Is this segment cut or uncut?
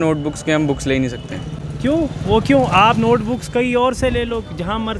uncut